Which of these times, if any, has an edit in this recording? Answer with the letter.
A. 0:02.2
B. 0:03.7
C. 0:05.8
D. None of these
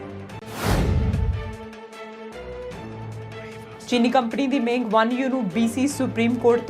B